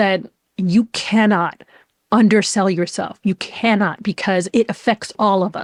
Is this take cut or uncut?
uncut